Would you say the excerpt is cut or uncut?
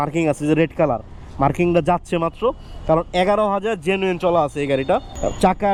uncut